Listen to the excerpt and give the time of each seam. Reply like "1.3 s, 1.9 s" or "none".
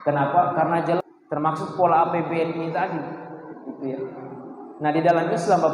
1.0 s